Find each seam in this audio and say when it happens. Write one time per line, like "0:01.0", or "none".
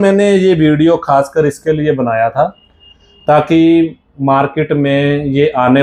none